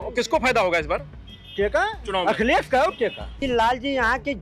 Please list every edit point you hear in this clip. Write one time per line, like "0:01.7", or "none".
0:03.4